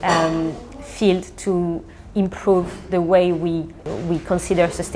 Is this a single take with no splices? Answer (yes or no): no